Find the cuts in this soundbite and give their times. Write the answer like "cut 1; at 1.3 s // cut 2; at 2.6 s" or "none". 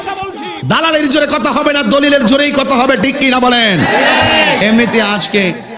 cut 1; at 4.6 s